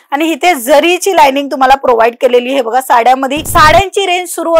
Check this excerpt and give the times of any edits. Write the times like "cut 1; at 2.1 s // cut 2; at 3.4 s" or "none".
cut 1; at 3.4 s